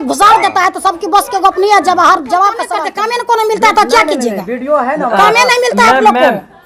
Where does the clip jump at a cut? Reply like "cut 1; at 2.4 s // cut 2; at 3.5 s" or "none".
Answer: cut 1; at 2.8 s